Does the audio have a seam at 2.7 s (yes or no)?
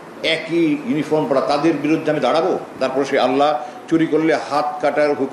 yes